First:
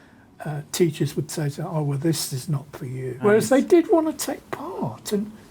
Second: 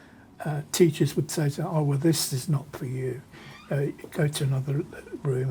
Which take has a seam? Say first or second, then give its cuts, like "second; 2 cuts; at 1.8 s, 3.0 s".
first; 1 cut; at 3.2 s